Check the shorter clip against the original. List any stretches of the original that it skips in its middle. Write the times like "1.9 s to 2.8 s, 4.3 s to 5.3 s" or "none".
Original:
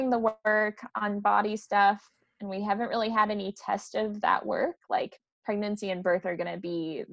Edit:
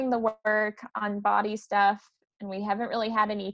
none